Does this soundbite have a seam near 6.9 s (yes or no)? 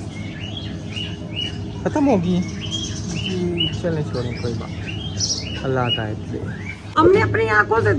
yes